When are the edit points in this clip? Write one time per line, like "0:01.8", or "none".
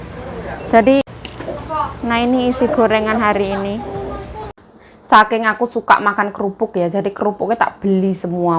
0:01.0
0:04.5